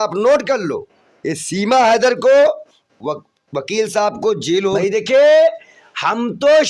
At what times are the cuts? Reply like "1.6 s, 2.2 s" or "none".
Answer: 4.8 s